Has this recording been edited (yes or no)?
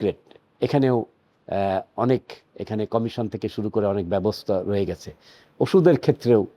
no